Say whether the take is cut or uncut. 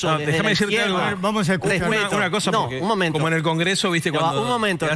uncut